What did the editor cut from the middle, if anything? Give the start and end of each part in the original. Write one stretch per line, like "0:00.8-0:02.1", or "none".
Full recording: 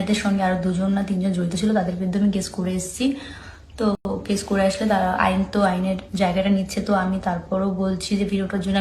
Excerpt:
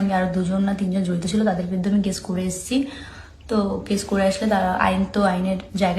0:04.0-0:04.1